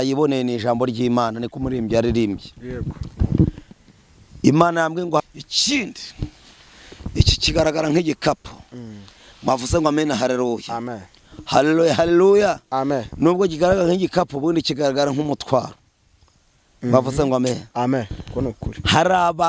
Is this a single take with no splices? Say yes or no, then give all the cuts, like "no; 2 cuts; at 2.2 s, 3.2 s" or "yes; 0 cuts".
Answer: no; 1 cut; at 5.2 s